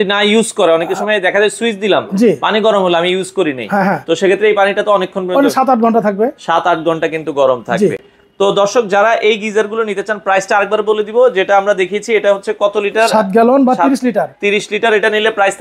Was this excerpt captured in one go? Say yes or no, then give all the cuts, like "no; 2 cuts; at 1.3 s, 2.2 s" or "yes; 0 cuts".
yes; 0 cuts